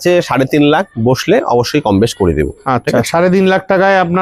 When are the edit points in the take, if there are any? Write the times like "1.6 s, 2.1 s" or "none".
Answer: none